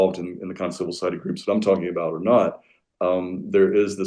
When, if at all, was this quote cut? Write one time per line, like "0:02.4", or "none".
none